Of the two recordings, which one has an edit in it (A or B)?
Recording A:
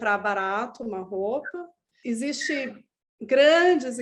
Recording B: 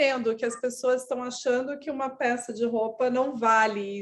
A